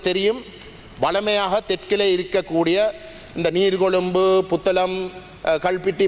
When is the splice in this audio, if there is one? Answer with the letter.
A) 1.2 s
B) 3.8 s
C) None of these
C